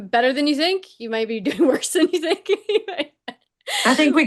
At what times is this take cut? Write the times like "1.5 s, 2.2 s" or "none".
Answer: none